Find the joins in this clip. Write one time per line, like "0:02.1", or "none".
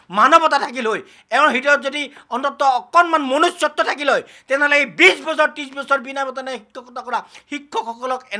none

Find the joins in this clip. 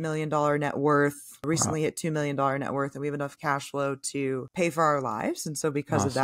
0:01.4

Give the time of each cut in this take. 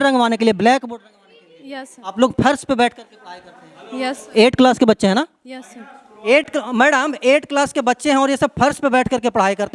none

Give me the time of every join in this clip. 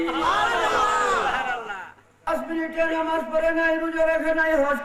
0:02.3

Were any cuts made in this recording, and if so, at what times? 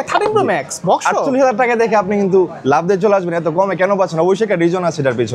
none

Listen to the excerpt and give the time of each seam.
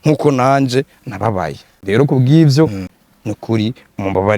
0:02.9

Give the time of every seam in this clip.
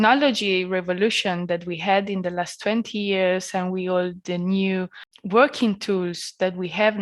0:05.1

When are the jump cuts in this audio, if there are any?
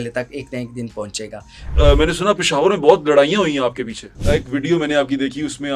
0:01.7
0:04.0

